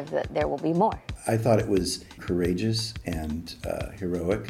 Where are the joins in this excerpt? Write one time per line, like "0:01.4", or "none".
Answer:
0:01.1
0:02.1